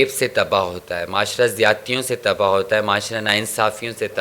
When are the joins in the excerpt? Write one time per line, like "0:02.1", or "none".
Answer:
none